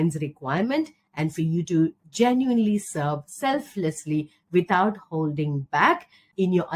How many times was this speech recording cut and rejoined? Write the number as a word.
zero